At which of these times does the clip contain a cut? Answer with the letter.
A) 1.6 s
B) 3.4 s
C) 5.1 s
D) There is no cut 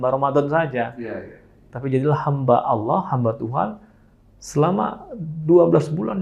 D